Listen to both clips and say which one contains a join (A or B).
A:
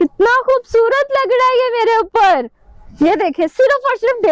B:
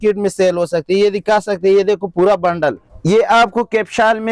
B